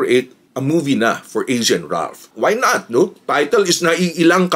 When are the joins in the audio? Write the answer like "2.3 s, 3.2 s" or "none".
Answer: 2.3 s